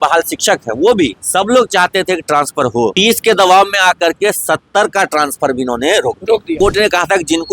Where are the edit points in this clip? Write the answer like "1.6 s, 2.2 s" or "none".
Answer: 1.2 s, 2.9 s, 6.5 s